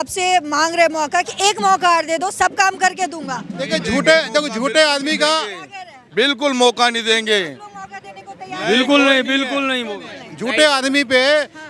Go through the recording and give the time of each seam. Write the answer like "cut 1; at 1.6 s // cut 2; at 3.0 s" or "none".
none